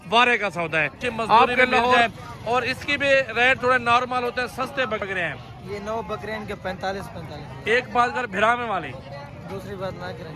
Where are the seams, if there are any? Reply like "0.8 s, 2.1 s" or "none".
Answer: 2.0 s, 5.0 s

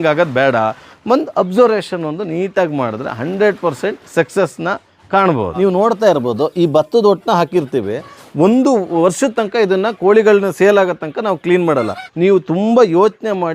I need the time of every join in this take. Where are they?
0.9 s, 5.5 s, 12.0 s

